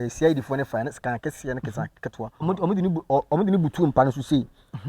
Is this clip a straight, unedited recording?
no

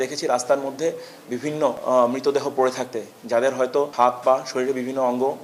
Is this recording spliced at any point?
no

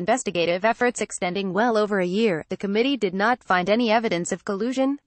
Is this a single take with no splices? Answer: no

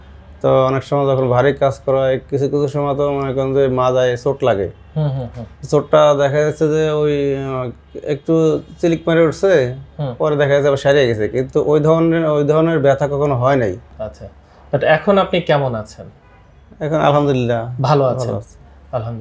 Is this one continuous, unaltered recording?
no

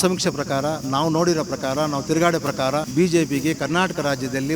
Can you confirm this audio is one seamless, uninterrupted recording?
no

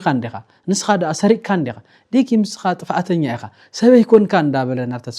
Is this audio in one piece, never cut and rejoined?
yes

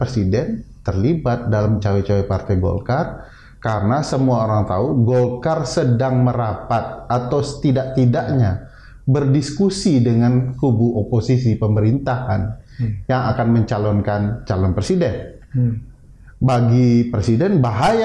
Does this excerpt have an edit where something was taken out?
no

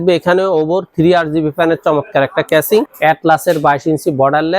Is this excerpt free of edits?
no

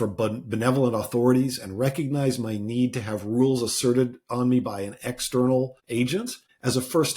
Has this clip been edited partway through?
yes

